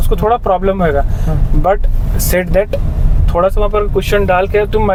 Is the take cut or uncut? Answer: uncut